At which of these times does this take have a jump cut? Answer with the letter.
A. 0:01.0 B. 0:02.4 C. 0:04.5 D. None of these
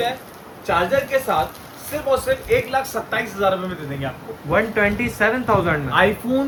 D